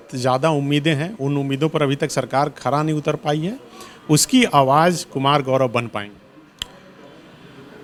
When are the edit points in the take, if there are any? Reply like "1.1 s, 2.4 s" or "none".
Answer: none